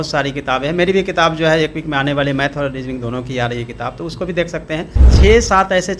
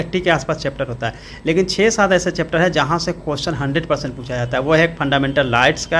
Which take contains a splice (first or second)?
first